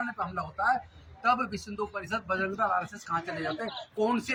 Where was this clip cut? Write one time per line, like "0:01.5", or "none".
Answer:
none